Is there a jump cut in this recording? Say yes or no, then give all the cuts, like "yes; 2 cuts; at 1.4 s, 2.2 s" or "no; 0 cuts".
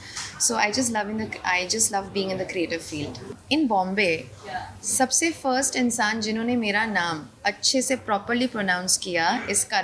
yes; 1 cut; at 3.3 s